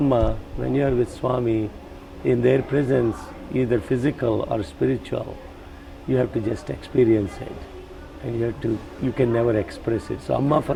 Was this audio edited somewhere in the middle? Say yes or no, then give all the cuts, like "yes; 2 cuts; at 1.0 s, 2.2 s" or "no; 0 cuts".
no; 0 cuts